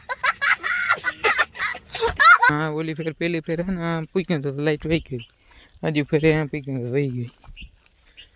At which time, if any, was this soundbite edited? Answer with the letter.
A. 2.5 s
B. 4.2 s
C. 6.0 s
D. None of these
A